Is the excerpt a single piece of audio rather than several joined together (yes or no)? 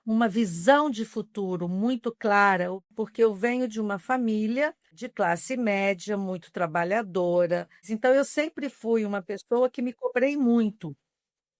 no